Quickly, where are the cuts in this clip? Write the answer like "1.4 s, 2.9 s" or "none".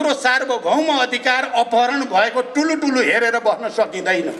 none